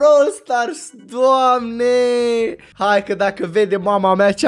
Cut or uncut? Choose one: cut